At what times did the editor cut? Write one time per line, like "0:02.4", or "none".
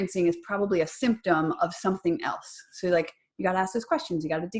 none